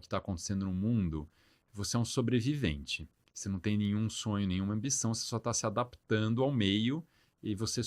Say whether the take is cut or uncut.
uncut